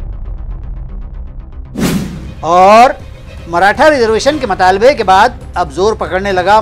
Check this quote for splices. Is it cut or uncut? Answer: uncut